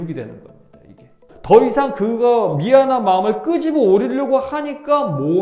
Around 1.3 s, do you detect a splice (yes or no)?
yes